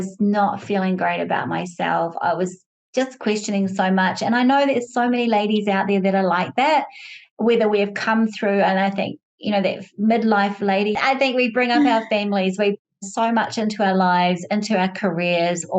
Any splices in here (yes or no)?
yes